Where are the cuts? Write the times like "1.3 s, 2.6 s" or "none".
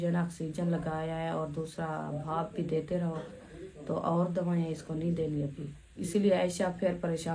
6.0 s